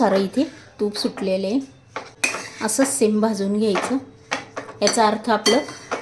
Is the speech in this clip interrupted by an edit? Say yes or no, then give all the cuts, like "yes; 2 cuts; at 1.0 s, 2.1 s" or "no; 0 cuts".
yes; 1 cut; at 2.0 s